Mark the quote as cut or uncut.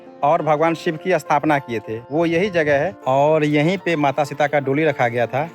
cut